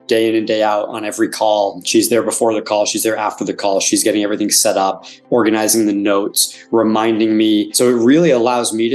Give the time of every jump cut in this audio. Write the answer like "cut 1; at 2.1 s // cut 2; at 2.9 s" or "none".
cut 1; at 1.8 s // cut 2; at 7.7 s